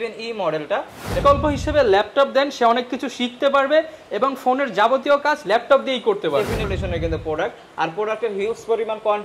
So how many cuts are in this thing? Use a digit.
2